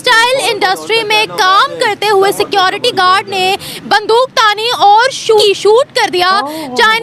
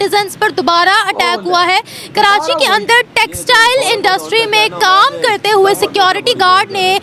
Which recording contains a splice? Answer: first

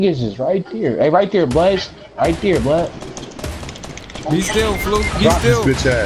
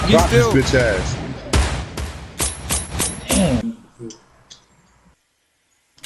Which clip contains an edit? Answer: second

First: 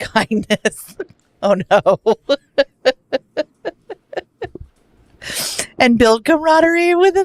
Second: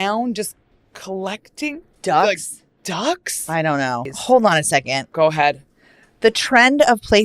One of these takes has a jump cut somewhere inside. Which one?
second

